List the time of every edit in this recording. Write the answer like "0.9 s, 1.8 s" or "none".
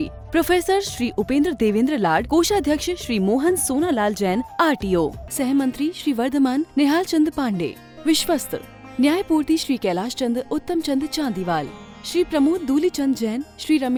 none